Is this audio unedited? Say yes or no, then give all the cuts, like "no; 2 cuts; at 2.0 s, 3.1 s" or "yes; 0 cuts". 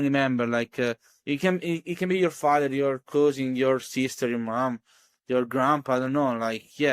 yes; 0 cuts